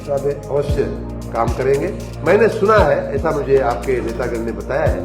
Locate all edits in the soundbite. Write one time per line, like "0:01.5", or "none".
0:02.1